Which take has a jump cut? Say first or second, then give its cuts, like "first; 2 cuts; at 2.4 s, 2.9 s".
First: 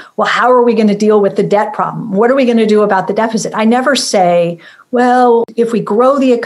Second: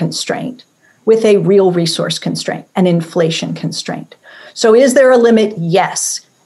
first; 1 cut; at 5.5 s